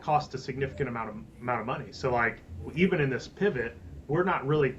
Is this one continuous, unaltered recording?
yes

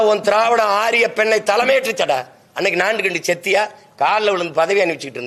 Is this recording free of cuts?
yes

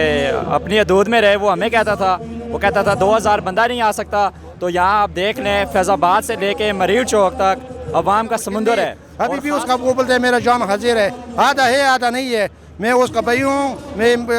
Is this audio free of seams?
no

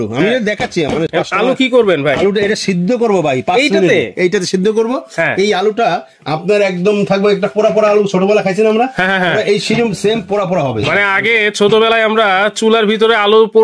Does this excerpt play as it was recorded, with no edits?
yes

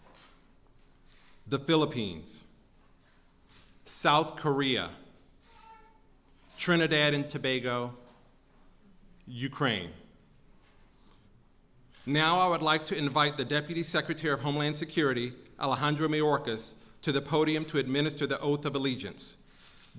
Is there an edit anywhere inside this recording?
yes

